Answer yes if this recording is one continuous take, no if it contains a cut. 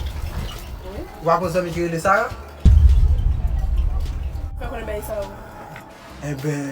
no